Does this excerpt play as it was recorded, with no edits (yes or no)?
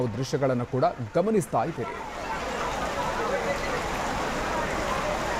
yes